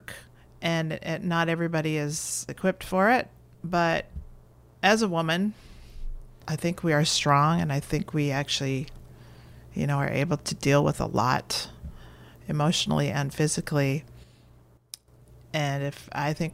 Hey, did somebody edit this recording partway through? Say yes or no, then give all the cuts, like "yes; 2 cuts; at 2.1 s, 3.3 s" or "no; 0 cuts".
no; 0 cuts